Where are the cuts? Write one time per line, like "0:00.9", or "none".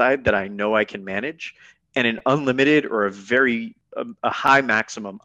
0:03.8